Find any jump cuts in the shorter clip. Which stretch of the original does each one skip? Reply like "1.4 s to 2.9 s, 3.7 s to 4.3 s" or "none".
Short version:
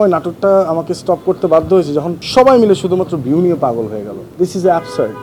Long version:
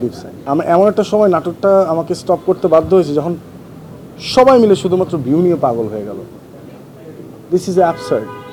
3.4 s to 4.2 s, 6.2 s to 7.3 s